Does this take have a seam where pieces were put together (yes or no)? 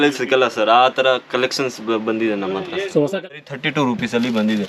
yes